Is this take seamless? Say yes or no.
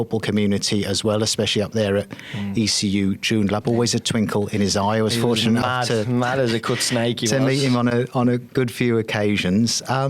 yes